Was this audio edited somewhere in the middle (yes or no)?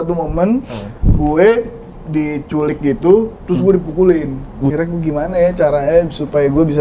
yes